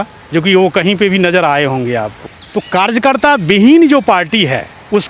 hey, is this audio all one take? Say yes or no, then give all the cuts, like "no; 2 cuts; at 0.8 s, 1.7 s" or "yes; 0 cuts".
no; 1 cut; at 2.2 s